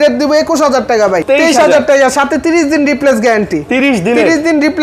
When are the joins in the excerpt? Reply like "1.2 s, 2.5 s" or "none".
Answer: 1.2 s